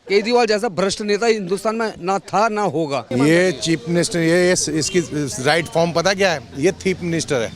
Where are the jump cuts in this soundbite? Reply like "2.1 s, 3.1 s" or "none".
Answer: 3.1 s